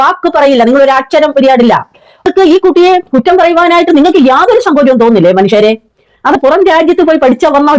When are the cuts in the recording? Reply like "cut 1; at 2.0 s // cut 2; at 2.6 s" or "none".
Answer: cut 1; at 2.3 s // cut 2; at 6.4 s